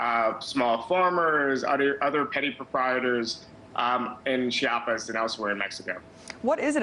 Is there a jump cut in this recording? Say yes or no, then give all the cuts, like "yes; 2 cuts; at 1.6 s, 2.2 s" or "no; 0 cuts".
yes; 1 cut; at 1.9 s